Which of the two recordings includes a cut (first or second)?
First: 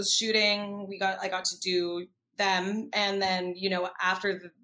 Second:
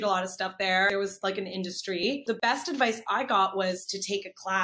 second